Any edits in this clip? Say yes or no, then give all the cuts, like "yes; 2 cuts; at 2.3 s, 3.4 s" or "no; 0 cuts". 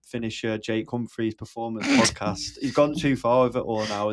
no; 0 cuts